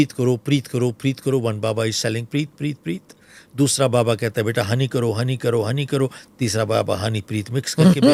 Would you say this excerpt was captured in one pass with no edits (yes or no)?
yes